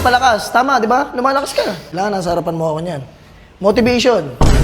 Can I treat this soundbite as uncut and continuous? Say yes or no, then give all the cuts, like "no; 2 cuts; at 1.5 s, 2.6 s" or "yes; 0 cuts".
no; 1 cut; at 1.8 s